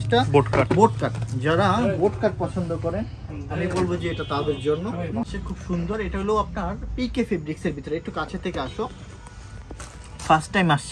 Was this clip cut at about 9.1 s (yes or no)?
no